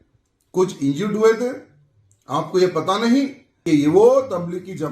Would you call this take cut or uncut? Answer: cut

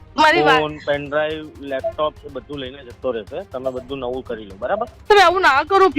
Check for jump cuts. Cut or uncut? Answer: cut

